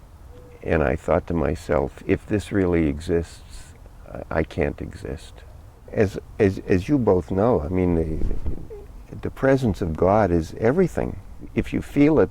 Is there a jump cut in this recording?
yes; 2 cuts; at 5.8 s, 11.4 s

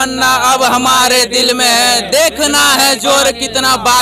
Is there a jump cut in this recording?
no; 0 cuts

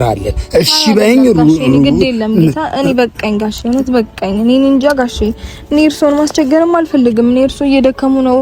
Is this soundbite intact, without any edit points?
yes; 0 cuts

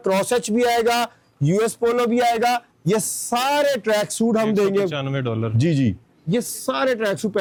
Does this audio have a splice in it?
no; 0 cuts

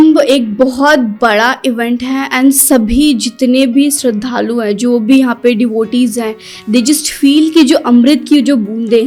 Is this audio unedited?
yes; 0 cuts

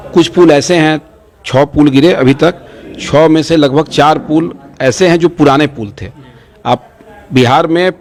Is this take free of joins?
yes; 0 cuts

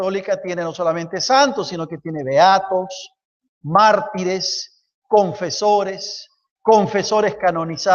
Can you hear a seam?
no; 0 cuts

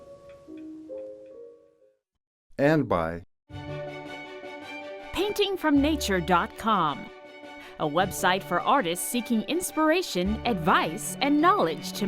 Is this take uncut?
no; 1 cut; at 3.5 s

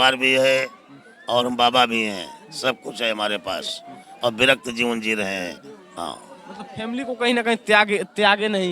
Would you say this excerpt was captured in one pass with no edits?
yes; 0 cuts

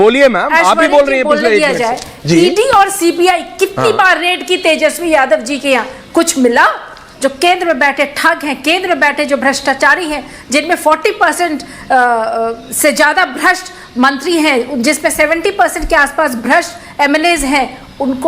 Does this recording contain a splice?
yes; 1 cut; at 7.1 s

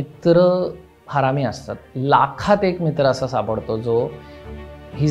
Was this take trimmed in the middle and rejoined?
yes; 1 cut; at 1.8 s

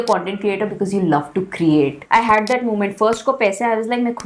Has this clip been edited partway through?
yes; 1 cut; at 2.0 s

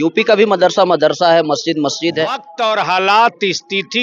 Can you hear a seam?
yes; 1 cut; at 2.5 s

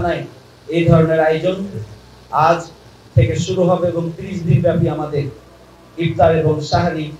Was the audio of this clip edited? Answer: no; 0 cuts

